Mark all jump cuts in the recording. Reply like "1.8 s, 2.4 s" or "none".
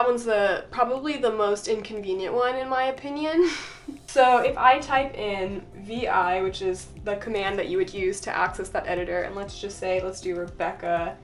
none